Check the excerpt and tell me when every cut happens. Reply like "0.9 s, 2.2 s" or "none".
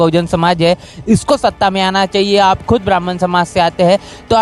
none